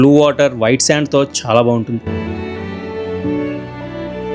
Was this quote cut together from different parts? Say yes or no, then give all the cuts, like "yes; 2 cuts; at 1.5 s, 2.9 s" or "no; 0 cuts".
no; 0 cuts